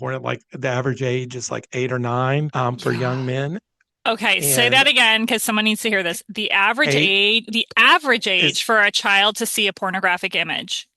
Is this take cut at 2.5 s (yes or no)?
yes